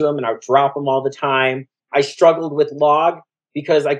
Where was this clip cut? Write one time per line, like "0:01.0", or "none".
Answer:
0:01.9